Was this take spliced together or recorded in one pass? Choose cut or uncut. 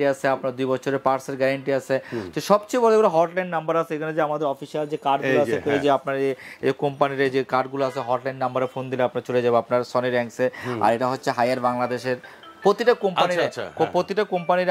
uncut